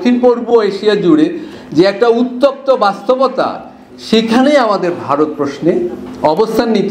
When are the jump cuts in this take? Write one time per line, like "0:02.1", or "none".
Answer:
none